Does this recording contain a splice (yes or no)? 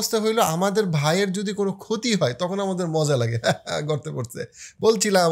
no